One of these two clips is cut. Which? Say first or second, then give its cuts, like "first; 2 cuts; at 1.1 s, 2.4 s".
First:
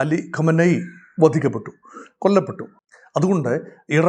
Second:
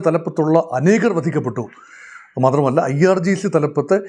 first; 1 cut; at 2.6 s